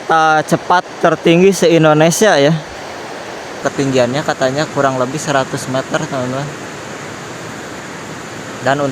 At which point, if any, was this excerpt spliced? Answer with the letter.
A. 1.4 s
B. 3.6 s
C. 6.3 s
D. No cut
B